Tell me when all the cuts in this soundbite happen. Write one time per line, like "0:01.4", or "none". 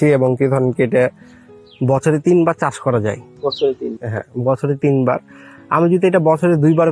none